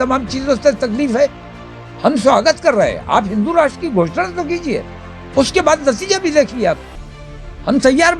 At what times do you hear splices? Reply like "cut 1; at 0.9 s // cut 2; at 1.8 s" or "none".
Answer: none